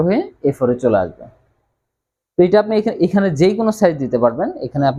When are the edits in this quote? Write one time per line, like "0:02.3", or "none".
none